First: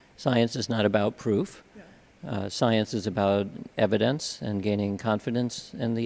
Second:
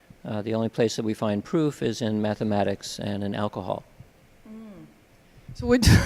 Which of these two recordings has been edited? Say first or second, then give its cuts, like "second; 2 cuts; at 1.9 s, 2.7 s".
second; 1 cut; at 3.4 s